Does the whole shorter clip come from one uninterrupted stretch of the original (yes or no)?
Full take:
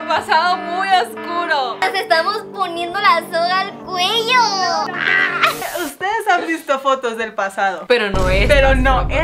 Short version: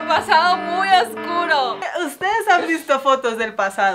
no